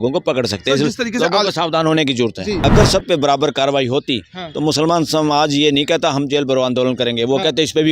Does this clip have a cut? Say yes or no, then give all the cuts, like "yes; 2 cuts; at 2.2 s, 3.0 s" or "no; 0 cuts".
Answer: yes; 1 cut; at 2.6 s